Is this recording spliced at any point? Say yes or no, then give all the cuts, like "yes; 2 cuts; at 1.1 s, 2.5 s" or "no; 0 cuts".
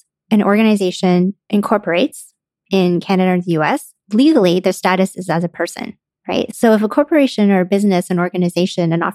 yes; 1 cut; at 6.5 s